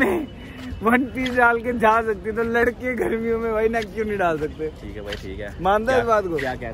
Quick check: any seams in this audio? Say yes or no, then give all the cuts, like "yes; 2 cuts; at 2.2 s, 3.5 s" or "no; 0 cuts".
no; 0 cuts